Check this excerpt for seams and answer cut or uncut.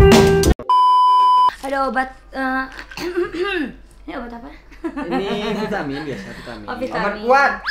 cut